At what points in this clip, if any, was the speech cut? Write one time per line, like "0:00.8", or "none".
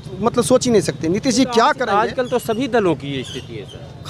none